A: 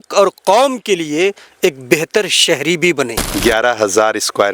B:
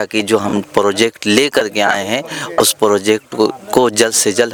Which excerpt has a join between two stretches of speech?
A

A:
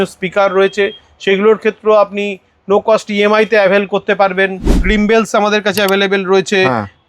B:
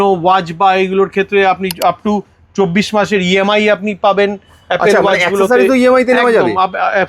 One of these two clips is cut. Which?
A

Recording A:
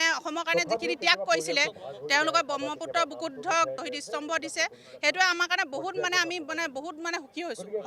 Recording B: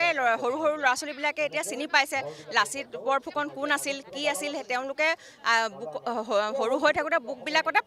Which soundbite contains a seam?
A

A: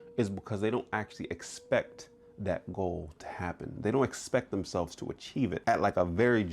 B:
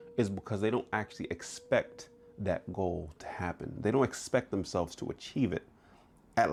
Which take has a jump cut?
A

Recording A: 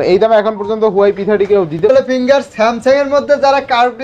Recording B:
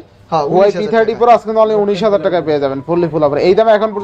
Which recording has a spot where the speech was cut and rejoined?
A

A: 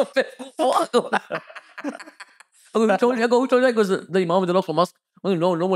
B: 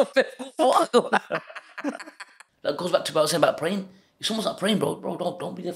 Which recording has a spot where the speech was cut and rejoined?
B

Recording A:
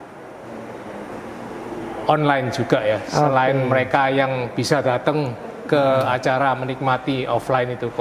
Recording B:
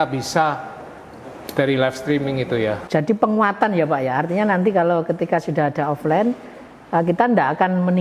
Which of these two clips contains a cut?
B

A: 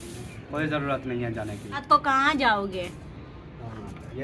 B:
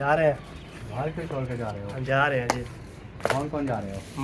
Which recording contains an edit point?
A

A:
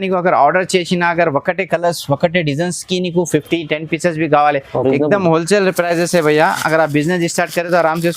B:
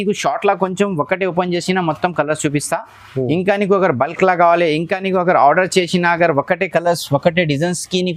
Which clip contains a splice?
A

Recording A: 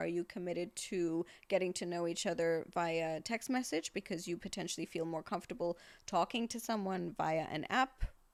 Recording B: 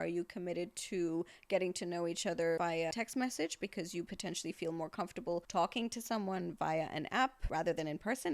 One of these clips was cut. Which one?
B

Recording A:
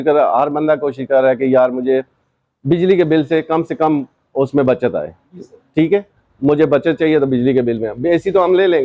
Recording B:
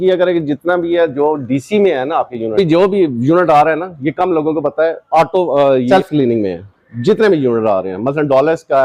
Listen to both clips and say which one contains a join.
B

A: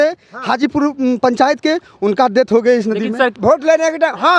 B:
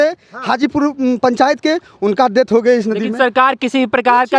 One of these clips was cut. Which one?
A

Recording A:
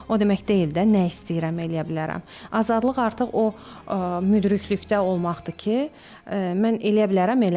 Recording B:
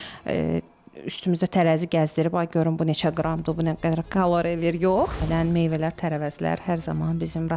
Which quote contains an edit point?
B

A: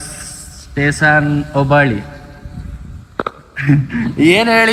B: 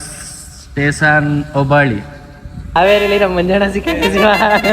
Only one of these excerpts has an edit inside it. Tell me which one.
B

